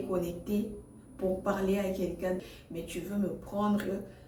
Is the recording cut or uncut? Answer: cut